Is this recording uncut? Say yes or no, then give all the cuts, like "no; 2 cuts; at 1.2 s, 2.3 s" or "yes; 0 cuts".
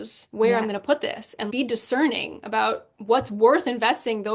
yes; 0 cuts